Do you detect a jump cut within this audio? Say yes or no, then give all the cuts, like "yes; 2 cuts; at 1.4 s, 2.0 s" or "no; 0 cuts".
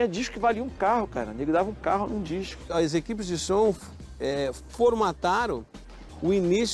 yes; 1 cut; at 2.6 s